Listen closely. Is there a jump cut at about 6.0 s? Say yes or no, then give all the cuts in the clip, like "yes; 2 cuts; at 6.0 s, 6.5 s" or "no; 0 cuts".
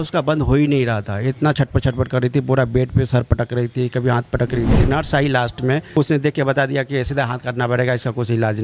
yes; 2 cuts; at 4.8 s, 6.0 s